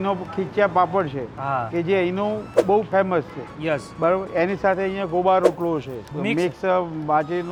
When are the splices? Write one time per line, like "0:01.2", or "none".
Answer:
none